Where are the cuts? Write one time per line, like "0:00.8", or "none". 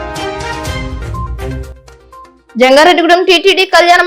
0:01.0
0:02.2